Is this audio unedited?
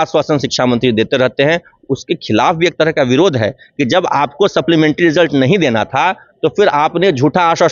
yes; 0 cuts

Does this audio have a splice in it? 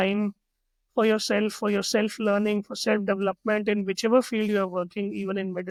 no; 0 cuts

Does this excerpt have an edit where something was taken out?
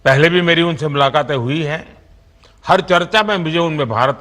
yes; 1 cut; at 3.3 s

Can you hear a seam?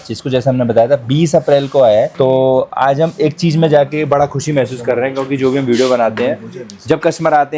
no; 0 cuts

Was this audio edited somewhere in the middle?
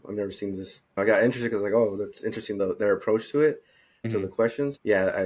yes; 3 cuts; at 1.0 s, 2.6 s, 4.2 s

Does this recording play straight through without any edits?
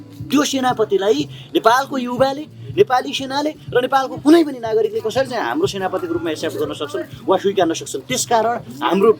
yes; 0 cuts

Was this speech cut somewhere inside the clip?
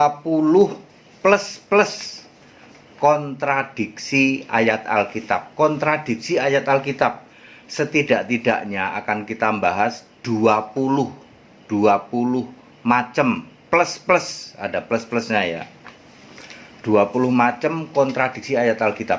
no; 0 cuts

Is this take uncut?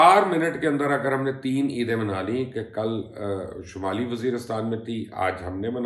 yes; 0 cuts

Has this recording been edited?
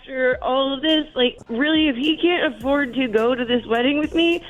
yes; 1 cut; at 1.4 s

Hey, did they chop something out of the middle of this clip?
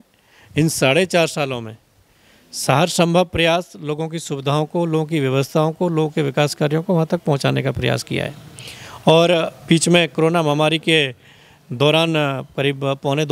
no; 0 cuts

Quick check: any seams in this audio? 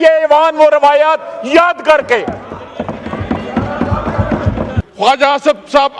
yes; 1 cut; at 4.8 s

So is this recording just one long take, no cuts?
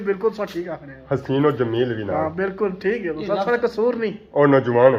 yes; 0 cuts

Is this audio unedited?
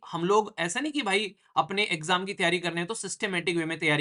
yes; 0 cuts

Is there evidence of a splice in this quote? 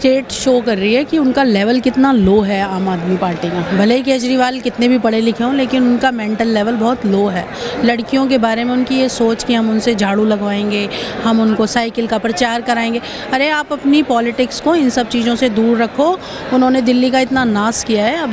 no; 0 cuts

